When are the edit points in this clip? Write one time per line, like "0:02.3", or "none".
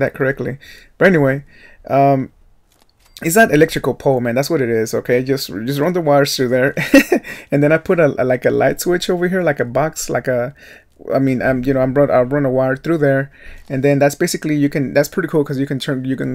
0:01.5